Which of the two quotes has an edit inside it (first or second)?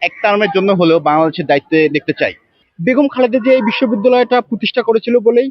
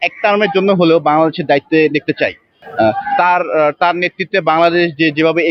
first